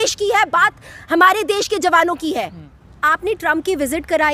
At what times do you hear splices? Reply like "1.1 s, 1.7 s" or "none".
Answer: none

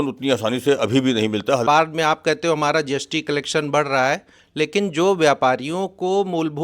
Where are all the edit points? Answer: 1.6 s

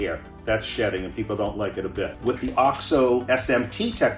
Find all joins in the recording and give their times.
2.1 s

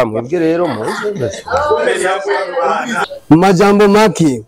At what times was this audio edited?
3.0 s

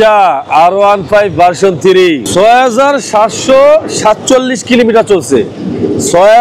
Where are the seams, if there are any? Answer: 2.2 s

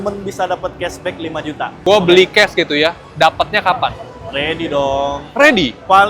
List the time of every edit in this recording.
1.8 s

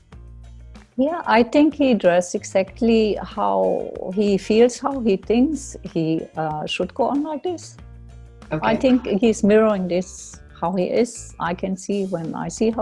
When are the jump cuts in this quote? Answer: 0.9 s

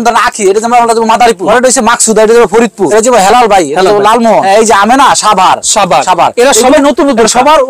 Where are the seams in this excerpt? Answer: 1.4 s, 2.9 s, 4.4 s

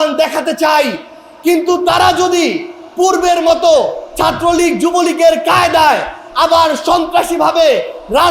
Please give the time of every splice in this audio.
none

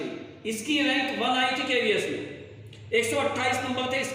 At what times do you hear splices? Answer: none

